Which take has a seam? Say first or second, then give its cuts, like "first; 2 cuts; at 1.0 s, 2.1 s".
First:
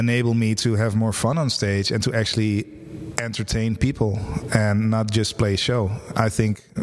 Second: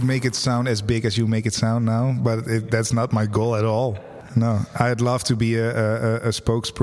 second; 1 cut; at 4.2 s